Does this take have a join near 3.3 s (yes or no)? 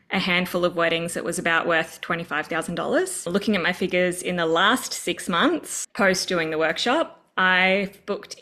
yes